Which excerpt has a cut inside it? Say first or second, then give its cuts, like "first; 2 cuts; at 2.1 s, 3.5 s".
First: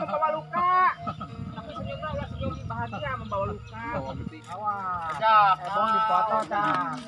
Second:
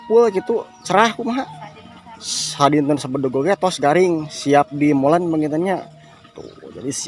first; 1 cut; at 4.4 s